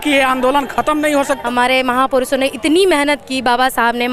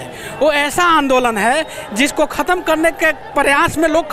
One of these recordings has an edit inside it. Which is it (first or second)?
first